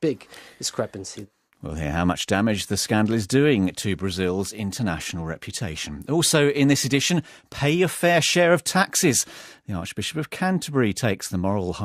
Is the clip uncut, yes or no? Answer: no